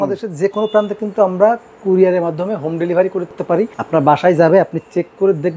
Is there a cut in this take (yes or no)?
yes